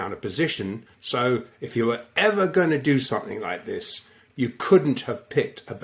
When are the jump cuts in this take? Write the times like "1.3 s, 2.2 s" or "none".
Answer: 0.9 s